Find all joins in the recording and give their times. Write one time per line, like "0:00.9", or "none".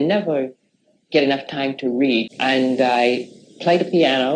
0:02.3